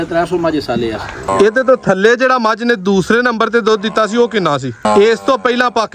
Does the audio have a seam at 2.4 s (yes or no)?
no